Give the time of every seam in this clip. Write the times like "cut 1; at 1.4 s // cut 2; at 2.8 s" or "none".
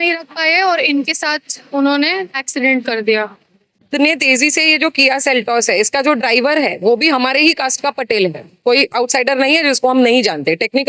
cut 1; at 3.8 s